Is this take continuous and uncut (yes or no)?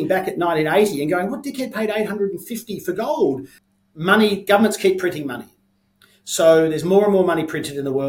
no